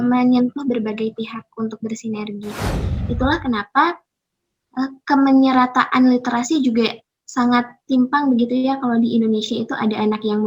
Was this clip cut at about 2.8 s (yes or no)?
yes